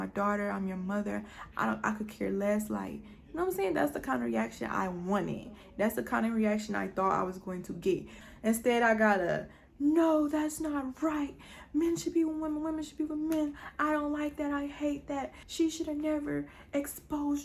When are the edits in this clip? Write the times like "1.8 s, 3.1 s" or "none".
8.2 s, 15.4 s

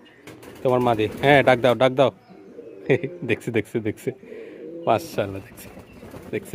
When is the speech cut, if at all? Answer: none

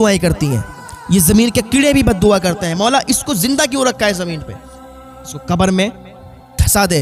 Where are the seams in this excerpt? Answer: none

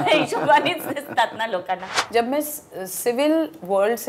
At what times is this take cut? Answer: 1.9 s

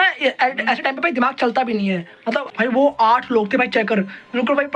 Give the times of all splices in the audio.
2.5 s

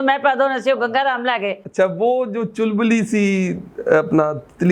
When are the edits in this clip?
1.6 s

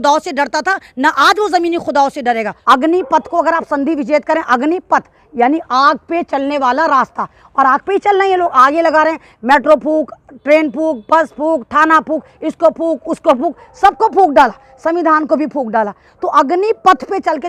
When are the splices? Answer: 2.5 s

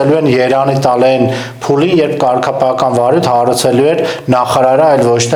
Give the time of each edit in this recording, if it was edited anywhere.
none

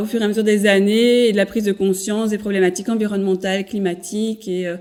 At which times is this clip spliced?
none

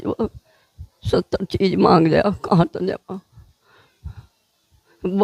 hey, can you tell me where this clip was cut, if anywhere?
none

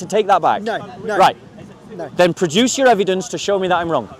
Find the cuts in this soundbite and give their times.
none

